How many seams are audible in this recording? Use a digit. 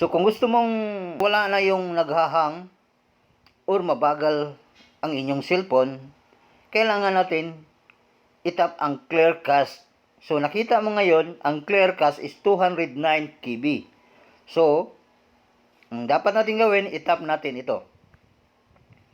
1